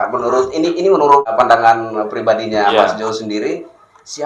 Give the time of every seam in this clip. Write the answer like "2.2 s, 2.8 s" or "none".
1.3 s